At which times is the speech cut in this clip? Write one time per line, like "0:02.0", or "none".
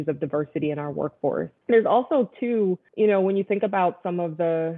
none